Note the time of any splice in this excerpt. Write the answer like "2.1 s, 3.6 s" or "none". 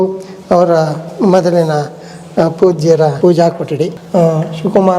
3.1 s, 4.0 s